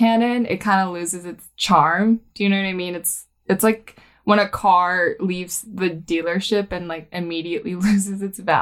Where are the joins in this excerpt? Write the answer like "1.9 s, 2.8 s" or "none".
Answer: none